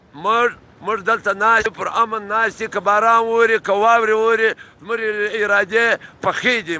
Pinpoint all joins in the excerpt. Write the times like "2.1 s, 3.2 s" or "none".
1.6 s

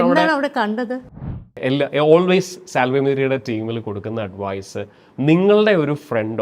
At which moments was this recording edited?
1.2 s

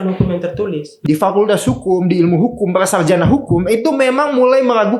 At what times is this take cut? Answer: 0.9 s

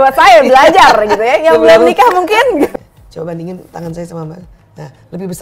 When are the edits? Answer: 2.7 s

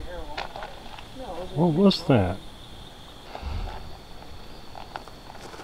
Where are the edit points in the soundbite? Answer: none

